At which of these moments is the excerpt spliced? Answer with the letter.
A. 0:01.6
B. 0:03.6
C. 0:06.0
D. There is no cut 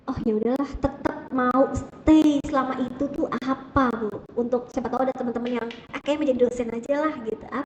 D